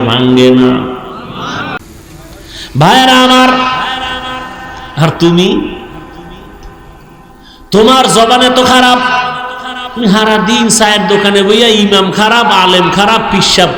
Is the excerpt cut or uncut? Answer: cut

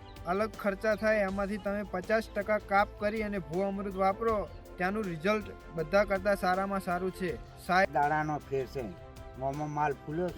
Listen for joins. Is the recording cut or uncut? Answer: cut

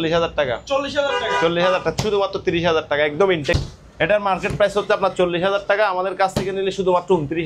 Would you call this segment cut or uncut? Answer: cut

